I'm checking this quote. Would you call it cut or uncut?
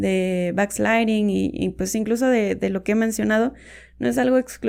uncut